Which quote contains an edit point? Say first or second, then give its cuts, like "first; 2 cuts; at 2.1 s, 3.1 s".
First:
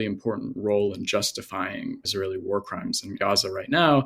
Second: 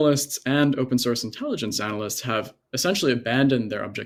first; 2 cuts; at 2.0 s, 3.2 s